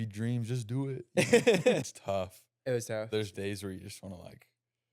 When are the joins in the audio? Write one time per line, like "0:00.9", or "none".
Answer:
0:01.8